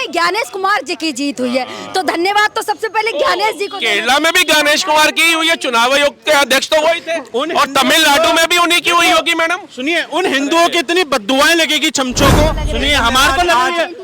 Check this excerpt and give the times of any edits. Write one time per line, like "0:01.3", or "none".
0:12.6